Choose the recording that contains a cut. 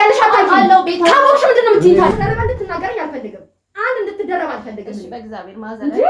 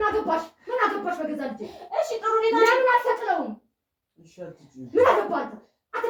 first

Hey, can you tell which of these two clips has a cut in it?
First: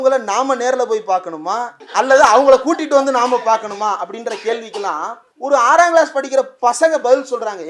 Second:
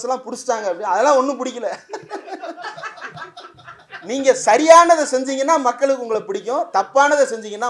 first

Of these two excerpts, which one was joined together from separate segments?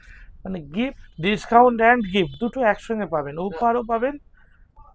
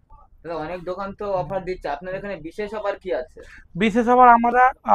first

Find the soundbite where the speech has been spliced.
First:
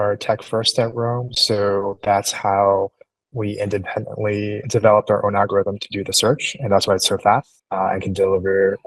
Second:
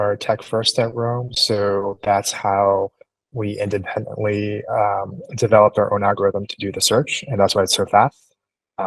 first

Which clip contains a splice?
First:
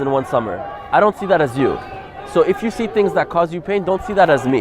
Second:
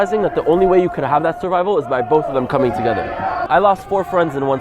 second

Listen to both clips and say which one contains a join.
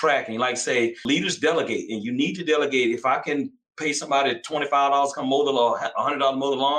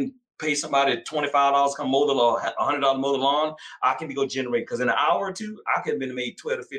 first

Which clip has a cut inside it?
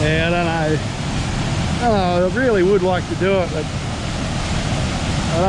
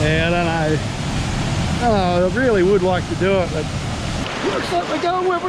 second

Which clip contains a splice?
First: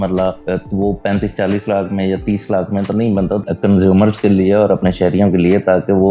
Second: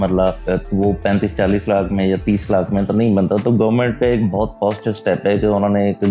first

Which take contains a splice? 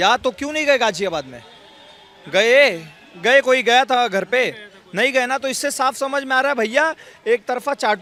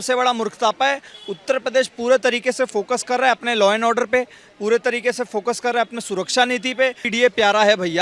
second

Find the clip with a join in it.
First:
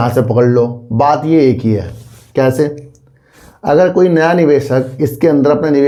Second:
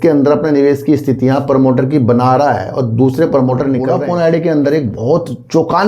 second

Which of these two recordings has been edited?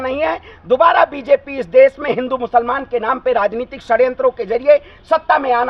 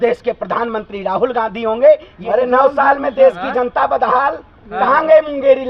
second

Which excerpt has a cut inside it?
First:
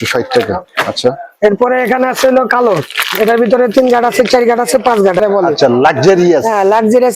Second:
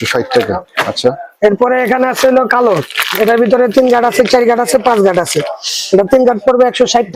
first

